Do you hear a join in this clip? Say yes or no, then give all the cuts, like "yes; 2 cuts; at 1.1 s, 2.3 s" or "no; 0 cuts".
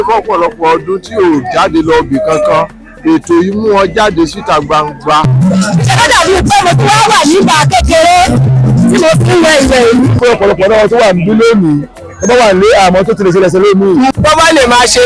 yes; 3 cuts; at 5.3 s, 10.1 s, 14.1 s